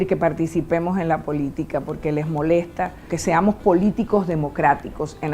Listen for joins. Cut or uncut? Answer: cut